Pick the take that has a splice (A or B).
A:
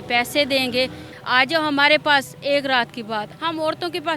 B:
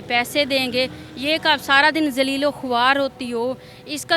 A